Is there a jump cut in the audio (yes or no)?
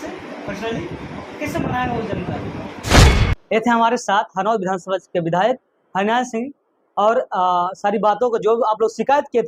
yes